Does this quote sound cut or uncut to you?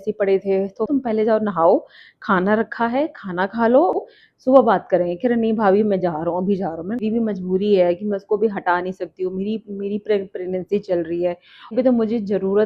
cut